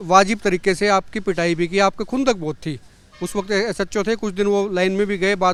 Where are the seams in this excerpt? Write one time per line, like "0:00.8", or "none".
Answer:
none